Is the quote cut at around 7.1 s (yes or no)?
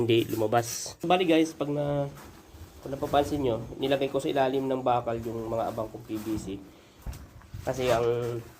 yes